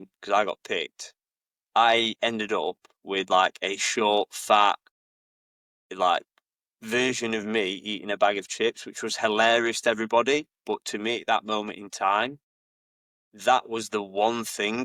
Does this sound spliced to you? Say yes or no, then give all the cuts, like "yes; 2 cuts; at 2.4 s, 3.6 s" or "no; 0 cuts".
no; 0 cuts